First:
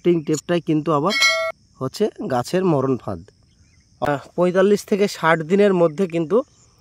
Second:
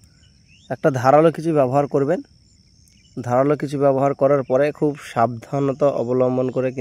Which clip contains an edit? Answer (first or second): first